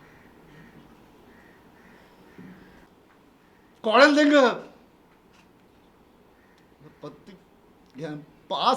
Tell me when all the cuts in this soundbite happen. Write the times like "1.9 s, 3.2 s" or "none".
2.9 s